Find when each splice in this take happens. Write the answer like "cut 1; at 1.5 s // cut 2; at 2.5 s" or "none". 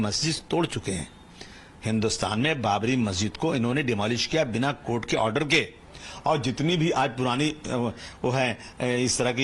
cut 1; at 3.8 s